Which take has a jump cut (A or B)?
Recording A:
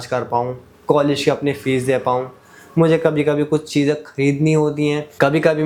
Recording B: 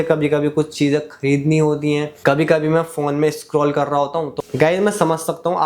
B